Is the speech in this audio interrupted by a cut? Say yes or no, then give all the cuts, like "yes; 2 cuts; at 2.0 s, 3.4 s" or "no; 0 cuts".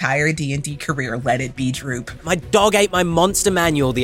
yes; 1 cut; at 2.2 s